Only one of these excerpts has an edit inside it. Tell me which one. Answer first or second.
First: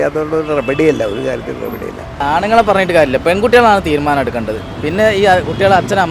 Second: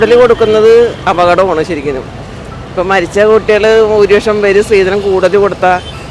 first